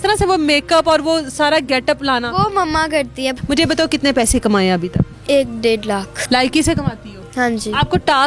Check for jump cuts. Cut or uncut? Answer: cut